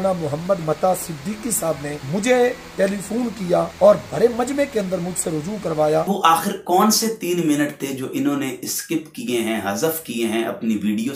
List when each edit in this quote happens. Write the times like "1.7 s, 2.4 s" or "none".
2.0 s, 3.7 s, 6.1 s